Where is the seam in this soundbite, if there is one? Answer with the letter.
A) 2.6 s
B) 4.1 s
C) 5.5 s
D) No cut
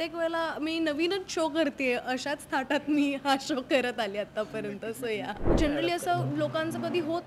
C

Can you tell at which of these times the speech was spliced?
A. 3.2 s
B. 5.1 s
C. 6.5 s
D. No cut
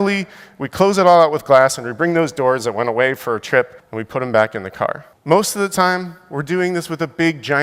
B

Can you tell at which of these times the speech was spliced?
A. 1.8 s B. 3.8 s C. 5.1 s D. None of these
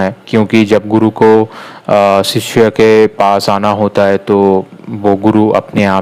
D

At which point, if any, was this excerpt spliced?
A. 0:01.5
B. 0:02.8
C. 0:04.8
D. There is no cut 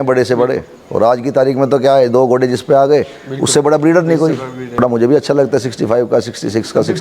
C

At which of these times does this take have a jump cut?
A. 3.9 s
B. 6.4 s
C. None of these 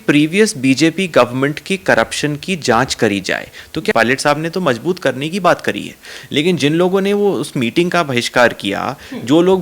A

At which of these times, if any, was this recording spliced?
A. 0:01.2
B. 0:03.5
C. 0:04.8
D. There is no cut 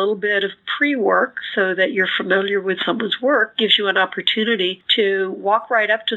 C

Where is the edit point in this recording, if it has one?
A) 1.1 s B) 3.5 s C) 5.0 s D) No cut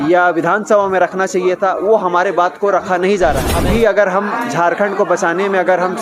B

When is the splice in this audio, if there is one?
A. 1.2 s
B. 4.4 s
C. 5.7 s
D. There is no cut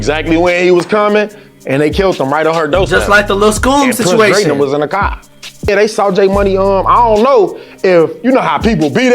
C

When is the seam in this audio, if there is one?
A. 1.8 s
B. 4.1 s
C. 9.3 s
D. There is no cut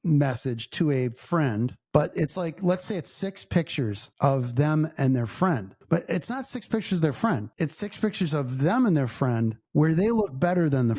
A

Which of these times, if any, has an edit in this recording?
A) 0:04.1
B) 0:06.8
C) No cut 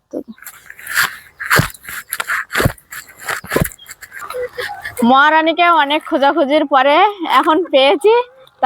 A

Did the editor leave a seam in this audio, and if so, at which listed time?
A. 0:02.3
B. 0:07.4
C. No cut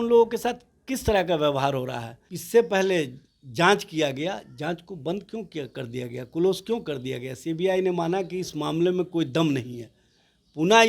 A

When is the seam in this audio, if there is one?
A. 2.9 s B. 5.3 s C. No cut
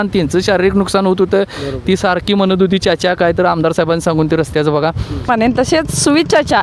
B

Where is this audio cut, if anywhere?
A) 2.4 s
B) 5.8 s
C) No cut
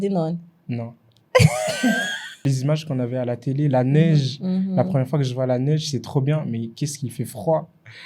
A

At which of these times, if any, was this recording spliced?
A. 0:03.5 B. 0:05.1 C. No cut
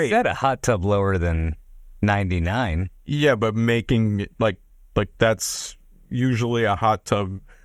C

